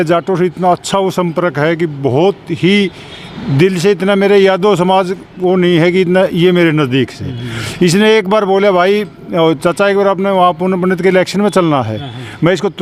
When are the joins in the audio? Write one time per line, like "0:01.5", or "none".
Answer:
none